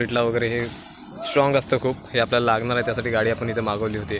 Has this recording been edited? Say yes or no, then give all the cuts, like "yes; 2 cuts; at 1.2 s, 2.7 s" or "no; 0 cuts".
no; 0 cuts